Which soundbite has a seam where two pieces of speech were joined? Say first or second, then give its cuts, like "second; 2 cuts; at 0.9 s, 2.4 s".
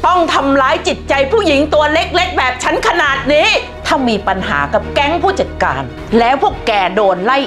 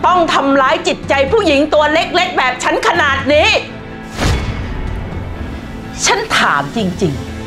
first; 2 cuts; at 3.7 s, 5.9 s